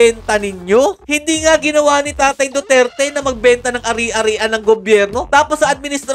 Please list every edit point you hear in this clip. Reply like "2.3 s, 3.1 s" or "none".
1.0 s

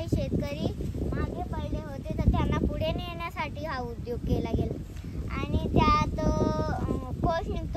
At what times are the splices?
none

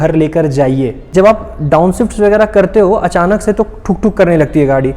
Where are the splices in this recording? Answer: 1.1 s

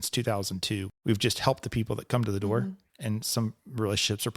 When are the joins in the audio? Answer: 0.9 s, 2.9 s

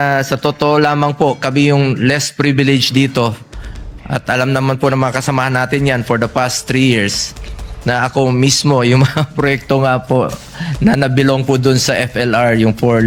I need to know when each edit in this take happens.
none

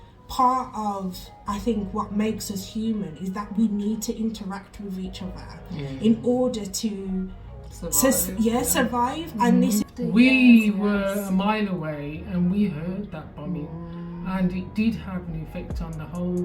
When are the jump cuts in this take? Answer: 9.8 s

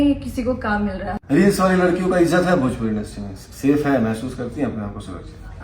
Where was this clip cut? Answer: 1.1 s

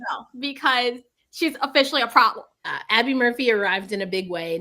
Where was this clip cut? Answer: 2.8 s

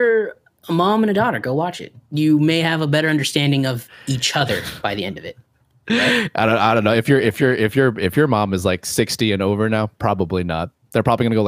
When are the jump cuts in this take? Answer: 2.0 s

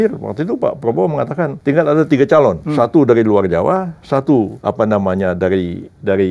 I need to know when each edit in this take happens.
1.6 s, 2.6 s, 4.6 s

